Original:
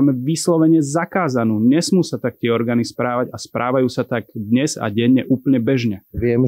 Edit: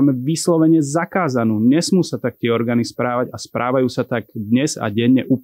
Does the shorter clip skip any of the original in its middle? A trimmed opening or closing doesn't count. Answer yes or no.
no